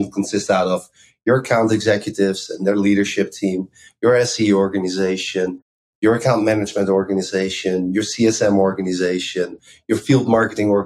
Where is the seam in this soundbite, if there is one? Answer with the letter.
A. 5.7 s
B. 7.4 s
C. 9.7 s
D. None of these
C